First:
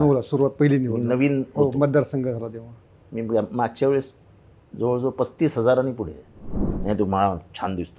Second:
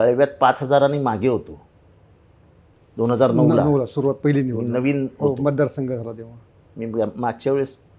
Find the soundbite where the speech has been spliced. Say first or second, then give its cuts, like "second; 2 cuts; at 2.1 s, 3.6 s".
first; 1 cut; at 6.6 s